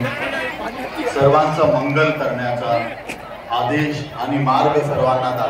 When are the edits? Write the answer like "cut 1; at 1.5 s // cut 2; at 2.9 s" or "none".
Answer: none